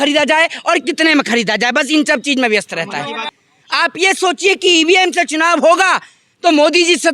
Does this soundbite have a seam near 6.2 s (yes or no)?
no